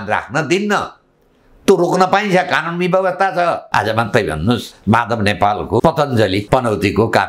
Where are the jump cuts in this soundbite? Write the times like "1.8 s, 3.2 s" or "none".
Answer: 3.6 s, 4.7 s, 5.8 s, 6.4 s